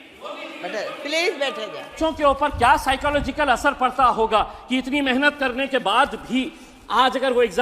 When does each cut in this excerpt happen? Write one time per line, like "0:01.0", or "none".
0:01.9